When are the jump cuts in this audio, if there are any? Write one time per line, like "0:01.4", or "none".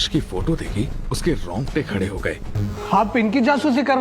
0:02.5